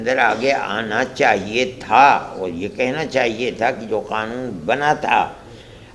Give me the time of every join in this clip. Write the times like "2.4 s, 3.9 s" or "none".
none